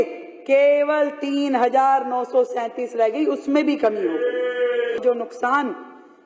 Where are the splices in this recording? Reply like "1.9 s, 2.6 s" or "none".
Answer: 5.0 s